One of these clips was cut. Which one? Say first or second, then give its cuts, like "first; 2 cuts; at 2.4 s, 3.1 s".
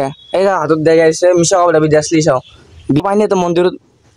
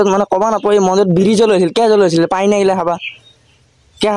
first; 1 cut; at 3.0 s